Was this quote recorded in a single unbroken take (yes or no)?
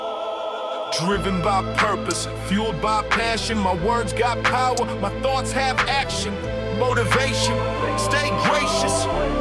yes